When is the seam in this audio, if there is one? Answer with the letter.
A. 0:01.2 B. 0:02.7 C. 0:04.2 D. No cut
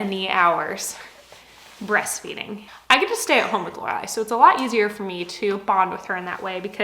B